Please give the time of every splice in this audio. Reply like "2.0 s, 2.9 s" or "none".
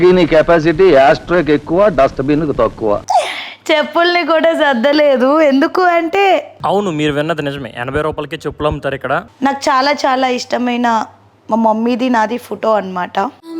3.0 s, 9.3 s